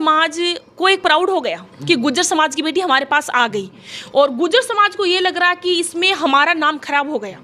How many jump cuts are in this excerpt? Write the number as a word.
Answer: zero